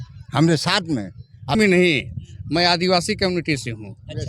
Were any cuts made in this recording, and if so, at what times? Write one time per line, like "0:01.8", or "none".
0:01.6